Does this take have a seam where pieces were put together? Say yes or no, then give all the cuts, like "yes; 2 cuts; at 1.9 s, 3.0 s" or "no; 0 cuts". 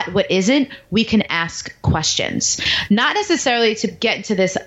no; 0 cuts